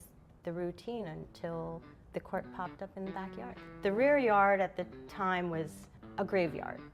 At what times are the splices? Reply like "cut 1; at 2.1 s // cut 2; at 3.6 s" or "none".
cut 1; at 3.7 s